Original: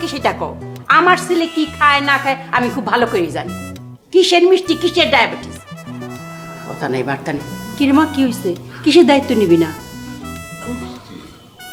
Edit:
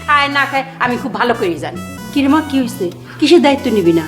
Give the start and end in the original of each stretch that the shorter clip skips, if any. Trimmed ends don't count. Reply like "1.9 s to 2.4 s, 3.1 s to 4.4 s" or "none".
3.7 s to 7.6 s